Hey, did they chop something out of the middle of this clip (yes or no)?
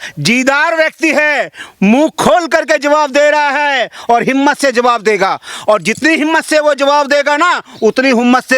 no